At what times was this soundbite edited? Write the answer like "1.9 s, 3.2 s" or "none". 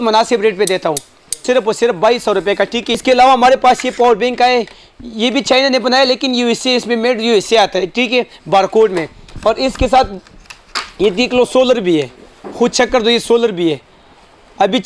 1.4 s, 2.8 s